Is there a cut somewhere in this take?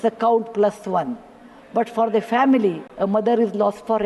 yes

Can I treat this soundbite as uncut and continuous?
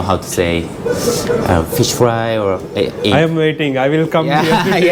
yes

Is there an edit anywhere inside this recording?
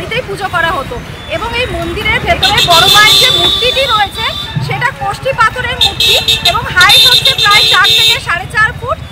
no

